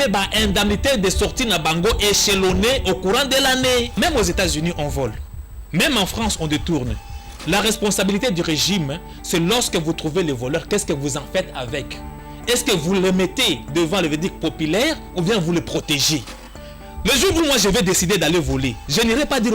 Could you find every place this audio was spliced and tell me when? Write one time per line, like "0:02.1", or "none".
0:03.9